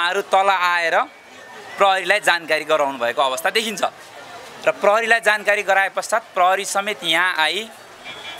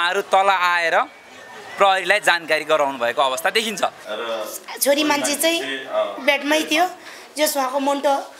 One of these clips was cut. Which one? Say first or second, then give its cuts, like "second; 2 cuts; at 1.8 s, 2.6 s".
second; 1 cut; at 4.1 s